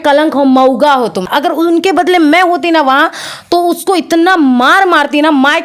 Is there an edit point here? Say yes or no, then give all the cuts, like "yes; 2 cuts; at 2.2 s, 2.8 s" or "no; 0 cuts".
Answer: yes; 1 cut; at 1.3 s